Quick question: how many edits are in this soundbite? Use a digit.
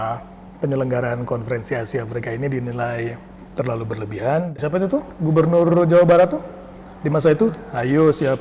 1